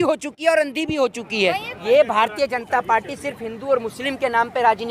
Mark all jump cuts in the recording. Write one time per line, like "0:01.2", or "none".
0:01.7